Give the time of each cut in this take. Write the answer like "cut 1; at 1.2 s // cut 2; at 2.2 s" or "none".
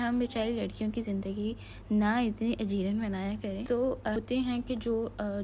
cut 1; at 4.2 s